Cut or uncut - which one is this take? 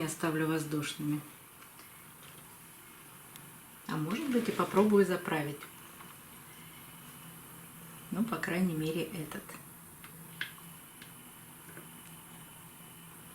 cut